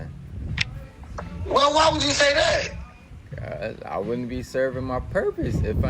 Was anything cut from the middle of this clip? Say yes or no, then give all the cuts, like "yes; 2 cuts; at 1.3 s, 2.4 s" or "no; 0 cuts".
no; 0 cuts